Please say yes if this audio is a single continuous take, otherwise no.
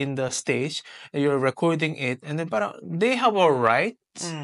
yes